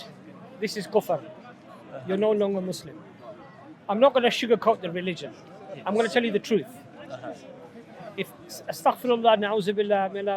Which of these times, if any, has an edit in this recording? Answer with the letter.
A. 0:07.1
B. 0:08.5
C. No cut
A